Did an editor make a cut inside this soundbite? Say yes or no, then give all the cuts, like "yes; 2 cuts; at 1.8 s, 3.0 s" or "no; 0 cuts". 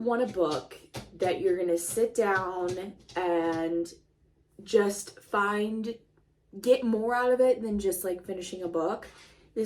no; 0 cuts